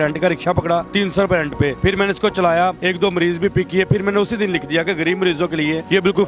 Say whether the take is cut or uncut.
uncut